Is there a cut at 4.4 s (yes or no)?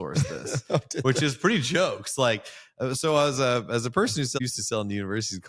yes